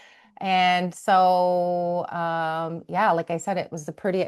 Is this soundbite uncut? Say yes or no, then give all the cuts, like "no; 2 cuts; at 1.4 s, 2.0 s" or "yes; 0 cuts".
yes; 0 cuts